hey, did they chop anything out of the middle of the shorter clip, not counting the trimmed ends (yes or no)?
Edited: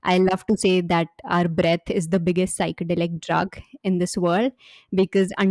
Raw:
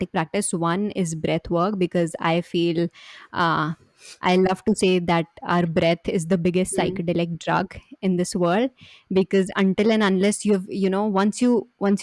no